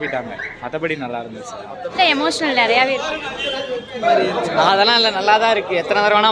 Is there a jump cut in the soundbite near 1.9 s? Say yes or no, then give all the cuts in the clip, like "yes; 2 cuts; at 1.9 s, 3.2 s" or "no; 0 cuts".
yes; 2 cuts; at 1.9 s, 4.0 s